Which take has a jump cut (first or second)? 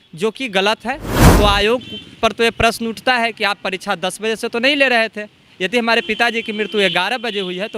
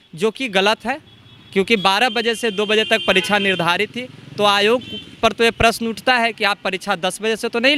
first